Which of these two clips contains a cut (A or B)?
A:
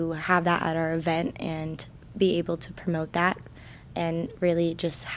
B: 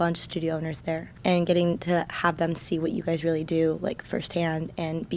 B